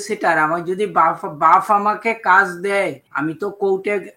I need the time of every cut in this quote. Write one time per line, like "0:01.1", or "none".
0:03.0